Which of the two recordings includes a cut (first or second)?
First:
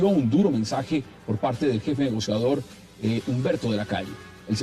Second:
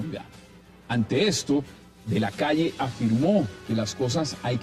second